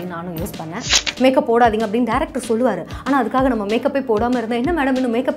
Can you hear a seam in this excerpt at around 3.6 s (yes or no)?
no